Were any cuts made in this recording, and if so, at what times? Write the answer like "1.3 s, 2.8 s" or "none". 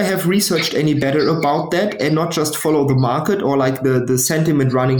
none